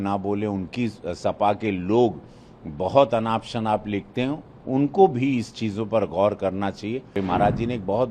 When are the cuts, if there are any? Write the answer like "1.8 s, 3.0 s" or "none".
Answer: 7.2 s